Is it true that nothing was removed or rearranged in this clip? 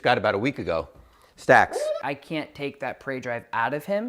no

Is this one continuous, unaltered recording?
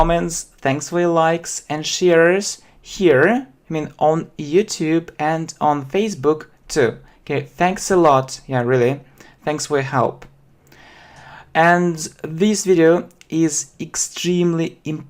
no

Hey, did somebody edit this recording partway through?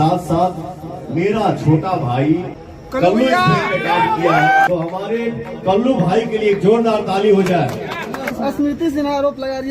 yes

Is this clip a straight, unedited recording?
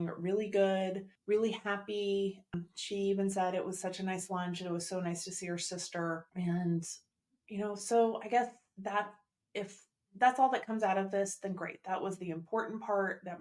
no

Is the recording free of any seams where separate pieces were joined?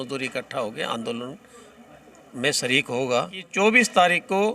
no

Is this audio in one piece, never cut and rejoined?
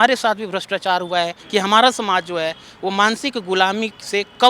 no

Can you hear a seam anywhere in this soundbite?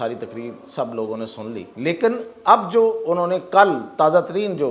yes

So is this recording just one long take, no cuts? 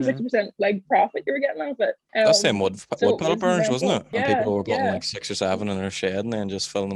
no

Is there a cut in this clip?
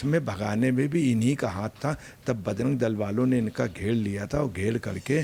no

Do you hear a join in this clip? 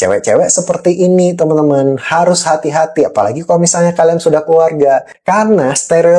yes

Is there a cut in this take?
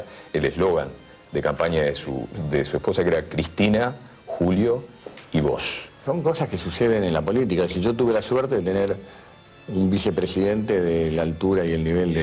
yes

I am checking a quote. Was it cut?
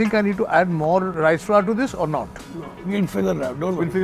yes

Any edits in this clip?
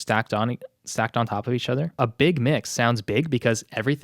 yes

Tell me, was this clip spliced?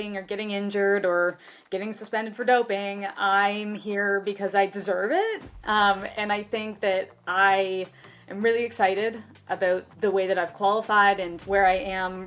yes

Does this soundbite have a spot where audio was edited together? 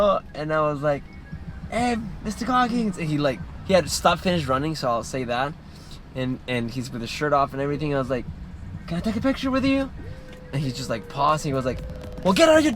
no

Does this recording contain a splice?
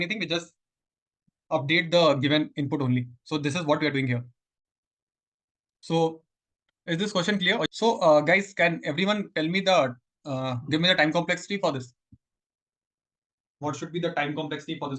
no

